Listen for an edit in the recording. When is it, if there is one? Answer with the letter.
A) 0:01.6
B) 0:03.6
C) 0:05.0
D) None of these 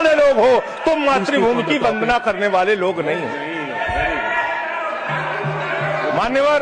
D